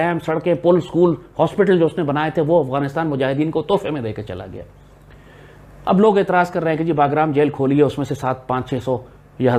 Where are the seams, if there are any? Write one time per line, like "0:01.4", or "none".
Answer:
none